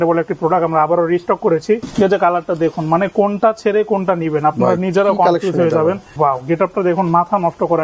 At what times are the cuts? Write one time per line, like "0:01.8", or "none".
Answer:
0:01.9
0:06.1